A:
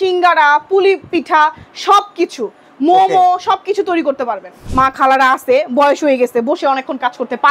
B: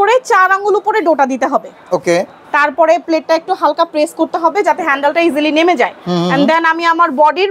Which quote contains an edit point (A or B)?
A